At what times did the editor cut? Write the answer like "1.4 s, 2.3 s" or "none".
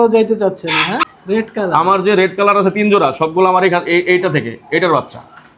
1.1 s